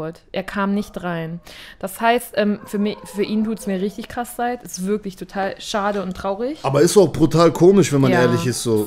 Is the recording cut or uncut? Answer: uncut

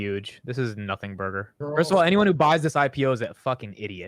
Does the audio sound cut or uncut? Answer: cut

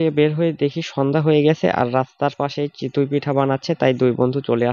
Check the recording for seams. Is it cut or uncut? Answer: uncut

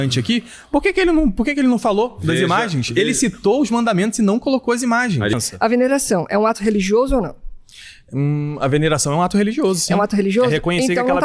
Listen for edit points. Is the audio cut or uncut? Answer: cut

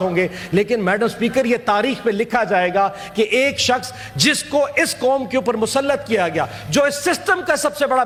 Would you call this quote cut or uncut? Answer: uncut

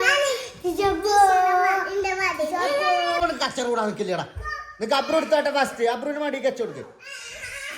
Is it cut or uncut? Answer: cut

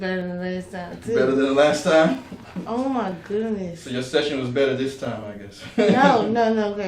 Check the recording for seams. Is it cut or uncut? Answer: uncut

